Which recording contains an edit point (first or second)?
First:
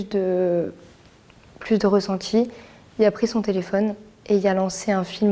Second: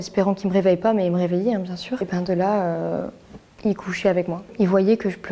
second